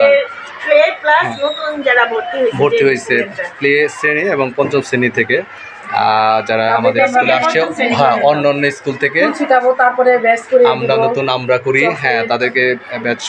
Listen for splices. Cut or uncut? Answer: uncut